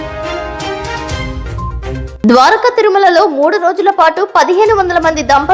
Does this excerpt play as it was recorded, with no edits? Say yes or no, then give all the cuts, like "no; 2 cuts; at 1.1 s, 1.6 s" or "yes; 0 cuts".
no; 1 cut; at 2.1 s